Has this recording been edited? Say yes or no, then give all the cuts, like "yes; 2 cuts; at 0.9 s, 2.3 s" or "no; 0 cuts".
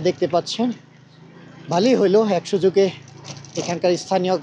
no; 0 cuts